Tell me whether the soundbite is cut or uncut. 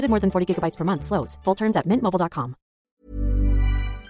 cut